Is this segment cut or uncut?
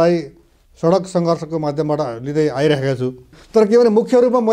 cut